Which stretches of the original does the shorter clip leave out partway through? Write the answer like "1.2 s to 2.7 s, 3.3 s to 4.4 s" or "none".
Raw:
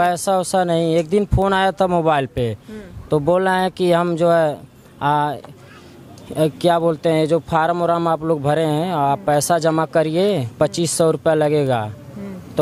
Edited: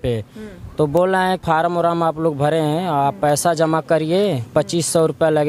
3.7 s to 7.5 s